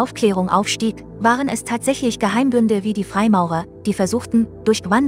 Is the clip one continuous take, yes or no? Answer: yes